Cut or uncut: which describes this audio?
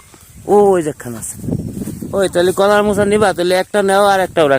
uncut